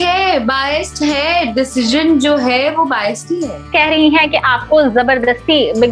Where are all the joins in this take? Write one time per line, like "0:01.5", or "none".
0:03.6